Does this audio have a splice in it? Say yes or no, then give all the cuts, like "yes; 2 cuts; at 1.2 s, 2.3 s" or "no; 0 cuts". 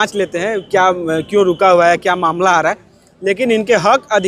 no; 0 cuts